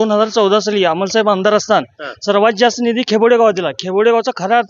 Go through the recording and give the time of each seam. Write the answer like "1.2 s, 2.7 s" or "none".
none